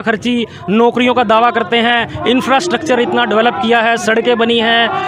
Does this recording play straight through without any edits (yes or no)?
yes